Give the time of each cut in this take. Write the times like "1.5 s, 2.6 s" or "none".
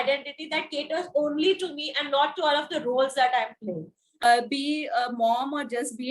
4.2 s